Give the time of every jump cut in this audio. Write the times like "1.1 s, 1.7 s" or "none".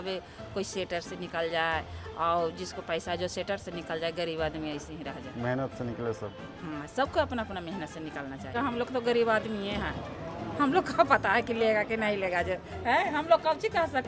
8.5 s